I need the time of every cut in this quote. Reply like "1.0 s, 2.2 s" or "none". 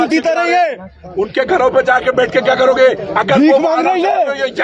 none